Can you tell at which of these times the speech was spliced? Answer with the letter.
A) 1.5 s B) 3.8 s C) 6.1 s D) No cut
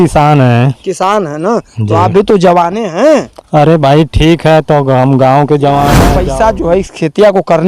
C